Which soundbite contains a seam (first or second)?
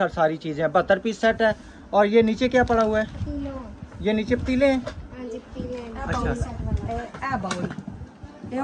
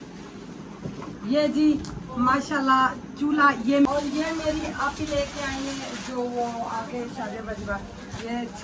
second